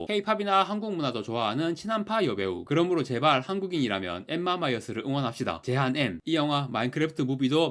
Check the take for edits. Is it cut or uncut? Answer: uncut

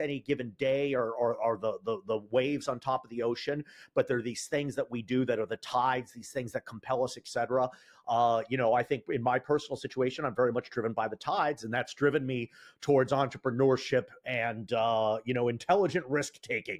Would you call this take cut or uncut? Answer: uncut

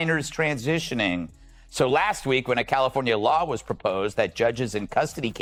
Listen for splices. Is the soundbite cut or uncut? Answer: uncut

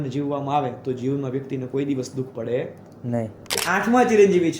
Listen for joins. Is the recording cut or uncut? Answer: cut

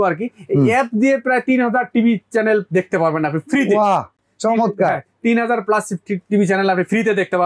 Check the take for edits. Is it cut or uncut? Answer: uncut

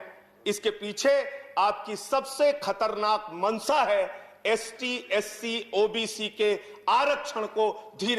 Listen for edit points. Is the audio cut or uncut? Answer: uncut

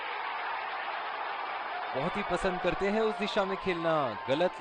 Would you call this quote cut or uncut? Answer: uncut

